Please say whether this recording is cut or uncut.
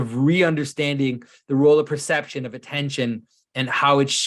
uncut